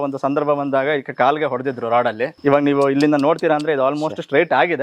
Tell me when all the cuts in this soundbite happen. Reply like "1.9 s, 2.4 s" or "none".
2.3 s